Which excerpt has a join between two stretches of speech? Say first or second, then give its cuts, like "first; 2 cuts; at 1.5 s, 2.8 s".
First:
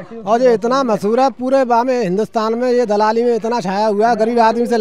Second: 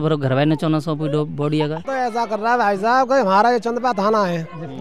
second; 1 cut; at 1.8 s